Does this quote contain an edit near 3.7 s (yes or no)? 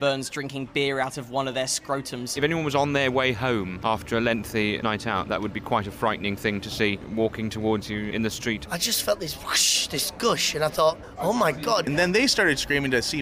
yes